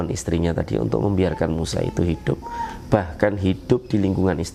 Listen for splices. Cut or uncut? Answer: uncut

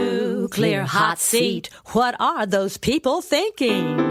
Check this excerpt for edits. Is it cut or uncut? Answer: uncut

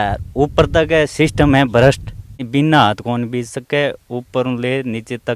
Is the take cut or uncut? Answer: cut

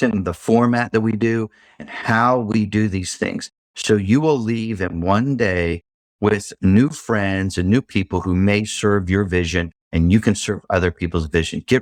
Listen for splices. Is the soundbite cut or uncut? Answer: uncut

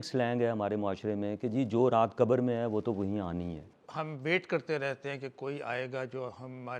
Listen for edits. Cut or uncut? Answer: cut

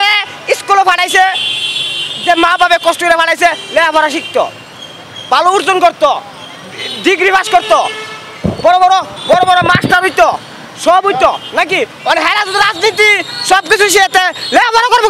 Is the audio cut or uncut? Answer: uncut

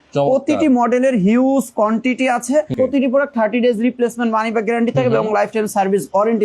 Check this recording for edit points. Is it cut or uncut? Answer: cut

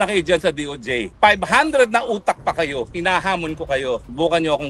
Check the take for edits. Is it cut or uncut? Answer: uncut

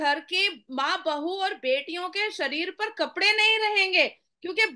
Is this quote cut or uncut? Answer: uncut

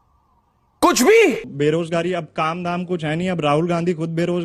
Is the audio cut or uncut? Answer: cut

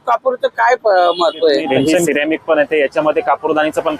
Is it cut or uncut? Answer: cut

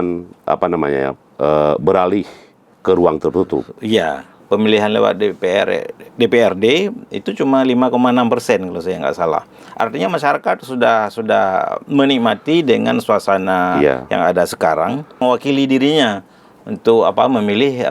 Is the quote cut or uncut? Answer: cut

